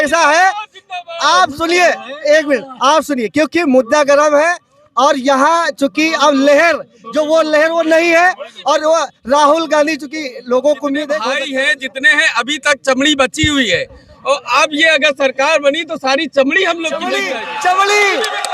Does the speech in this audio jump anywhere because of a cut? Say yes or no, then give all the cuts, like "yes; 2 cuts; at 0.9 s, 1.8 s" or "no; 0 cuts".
yes; 2 cuts; at 11.4 s, 17.2 s